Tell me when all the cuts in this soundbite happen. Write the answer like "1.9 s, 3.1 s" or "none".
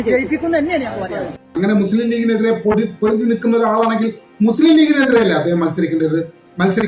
1.5 s